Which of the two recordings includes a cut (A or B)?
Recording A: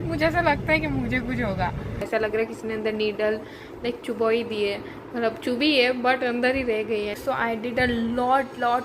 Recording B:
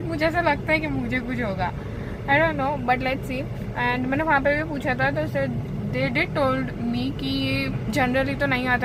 A